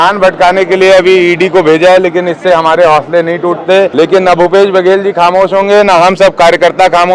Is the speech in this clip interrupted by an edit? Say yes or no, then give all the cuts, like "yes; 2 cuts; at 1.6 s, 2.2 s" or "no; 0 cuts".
yes; 1 cut; at 3.9 s